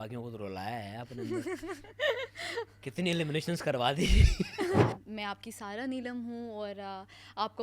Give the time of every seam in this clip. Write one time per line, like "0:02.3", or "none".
0:04.9